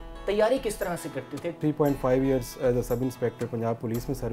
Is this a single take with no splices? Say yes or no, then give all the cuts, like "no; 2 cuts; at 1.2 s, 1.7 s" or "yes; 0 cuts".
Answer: no; 1 cut; at 1.6 s